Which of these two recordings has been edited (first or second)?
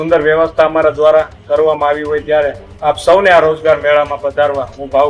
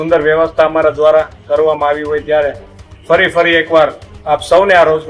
first